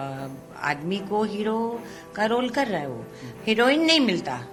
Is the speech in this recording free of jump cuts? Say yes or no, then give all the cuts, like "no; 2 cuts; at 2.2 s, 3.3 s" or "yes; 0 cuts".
yes; 0 cuts